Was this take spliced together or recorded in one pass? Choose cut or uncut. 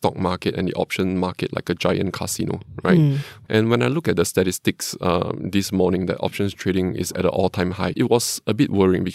cut